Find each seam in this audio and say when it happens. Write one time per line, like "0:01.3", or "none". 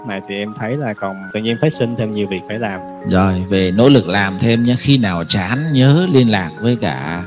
0:01.2
0:02.9